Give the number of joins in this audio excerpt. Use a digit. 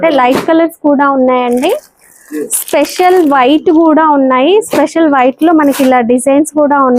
0